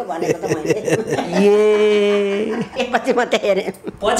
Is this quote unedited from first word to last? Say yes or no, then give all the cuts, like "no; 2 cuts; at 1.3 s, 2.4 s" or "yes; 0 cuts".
no; 1 cut; at 2.8 s